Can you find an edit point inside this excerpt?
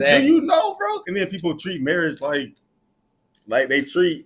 yes; 1 cut; at 1.0 s

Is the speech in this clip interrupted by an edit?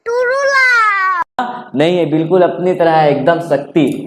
yes; 1 cut; at 1.4 s

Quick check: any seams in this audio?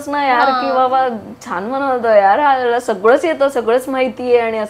no; 0 cuts

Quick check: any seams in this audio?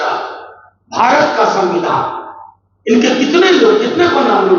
no; 0 cuts

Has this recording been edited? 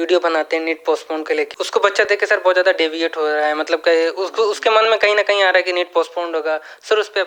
no; 0 cuts

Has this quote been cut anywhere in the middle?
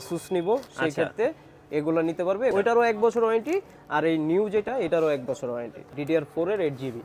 yes; 2 cuts; at 2.5 s, 5.9 s

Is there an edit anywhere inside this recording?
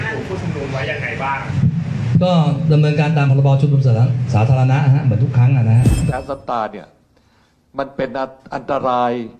yes; 1 cut; at 6.1 s

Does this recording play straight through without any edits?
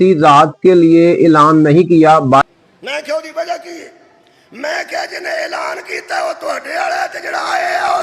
no; 1 cut; at 2.4 s

